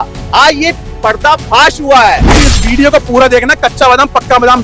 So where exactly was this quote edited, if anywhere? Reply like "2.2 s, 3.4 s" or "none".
2.4 s

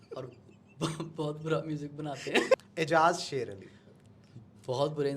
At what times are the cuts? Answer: 2.5 s

